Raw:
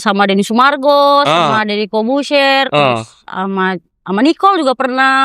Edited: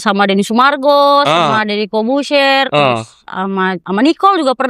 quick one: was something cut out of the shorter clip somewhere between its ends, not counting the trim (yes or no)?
yes